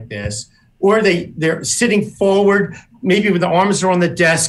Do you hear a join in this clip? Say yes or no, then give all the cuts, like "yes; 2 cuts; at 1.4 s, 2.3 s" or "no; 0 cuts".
no; 0 cuts